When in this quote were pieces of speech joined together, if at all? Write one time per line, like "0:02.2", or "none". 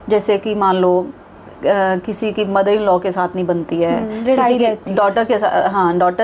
none